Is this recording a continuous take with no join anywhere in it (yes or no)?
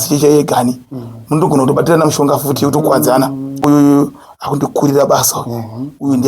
no